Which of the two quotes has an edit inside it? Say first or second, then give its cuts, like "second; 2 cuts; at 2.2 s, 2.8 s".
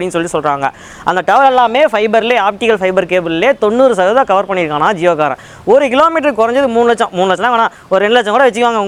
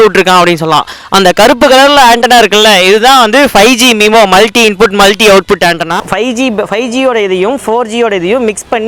second; 2 cuts; at 2.7 s, 6.0 s